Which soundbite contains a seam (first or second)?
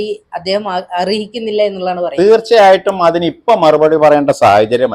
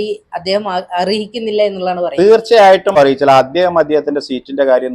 second